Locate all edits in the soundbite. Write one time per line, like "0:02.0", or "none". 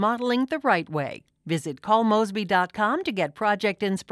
none